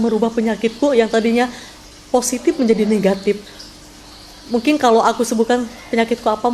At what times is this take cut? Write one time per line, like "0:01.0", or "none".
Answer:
none